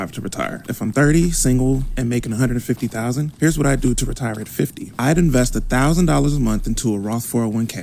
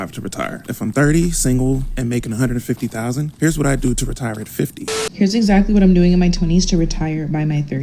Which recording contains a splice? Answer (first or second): second